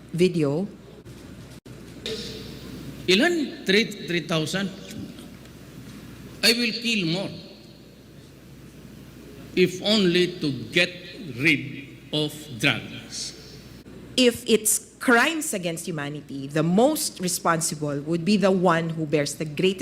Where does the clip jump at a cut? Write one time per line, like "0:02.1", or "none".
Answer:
0:01.0
0:13.7